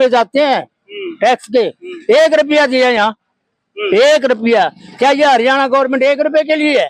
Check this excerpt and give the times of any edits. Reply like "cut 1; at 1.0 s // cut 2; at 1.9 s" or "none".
none